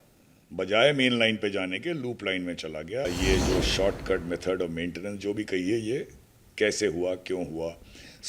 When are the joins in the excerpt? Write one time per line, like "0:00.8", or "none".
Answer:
0:03.1